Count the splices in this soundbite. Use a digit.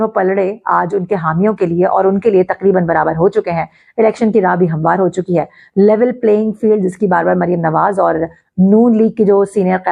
0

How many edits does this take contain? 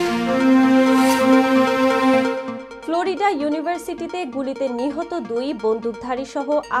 0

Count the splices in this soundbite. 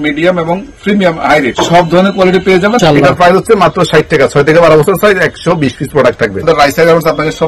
3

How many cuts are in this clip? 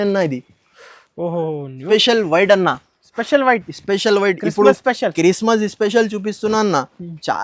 1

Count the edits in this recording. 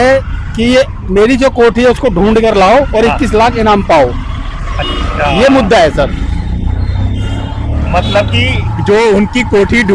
0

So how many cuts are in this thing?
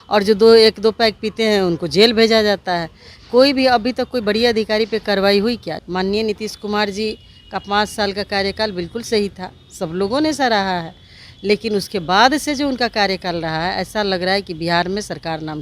1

